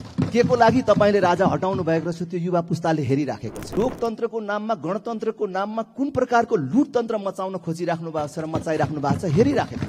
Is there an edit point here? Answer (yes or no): yes